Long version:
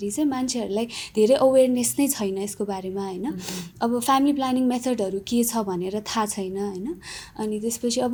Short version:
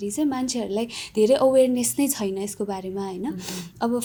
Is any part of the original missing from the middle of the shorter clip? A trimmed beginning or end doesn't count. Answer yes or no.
no